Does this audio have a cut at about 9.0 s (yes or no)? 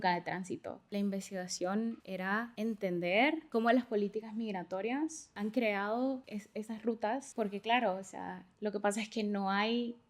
no